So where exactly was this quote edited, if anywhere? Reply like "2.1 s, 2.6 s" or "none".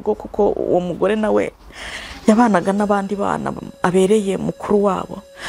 none